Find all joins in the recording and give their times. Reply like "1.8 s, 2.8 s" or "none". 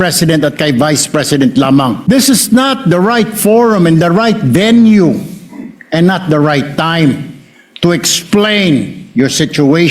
2.0 s